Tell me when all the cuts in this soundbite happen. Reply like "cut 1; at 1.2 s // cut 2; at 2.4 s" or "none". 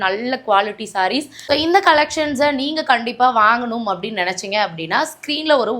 cut 1; at 1.3 s